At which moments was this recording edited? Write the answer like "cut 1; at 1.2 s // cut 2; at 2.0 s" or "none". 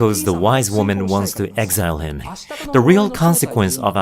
cut 1; at 2.3 s